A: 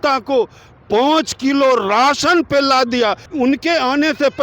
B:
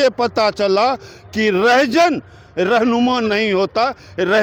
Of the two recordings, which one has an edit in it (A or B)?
A